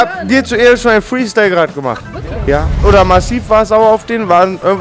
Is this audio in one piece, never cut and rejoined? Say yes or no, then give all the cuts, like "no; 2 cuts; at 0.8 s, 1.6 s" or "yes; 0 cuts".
no; 1 cut; at 2.7 s